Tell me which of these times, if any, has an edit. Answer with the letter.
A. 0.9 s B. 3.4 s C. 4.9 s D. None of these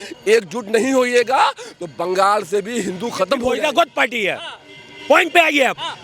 B